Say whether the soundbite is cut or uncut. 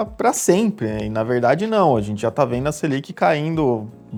uncut